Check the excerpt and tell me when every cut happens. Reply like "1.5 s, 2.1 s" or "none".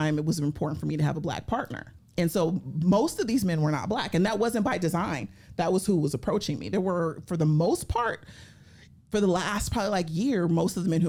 none